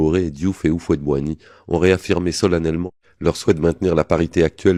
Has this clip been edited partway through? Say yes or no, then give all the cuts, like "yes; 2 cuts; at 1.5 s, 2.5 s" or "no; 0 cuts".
no; 0 cuts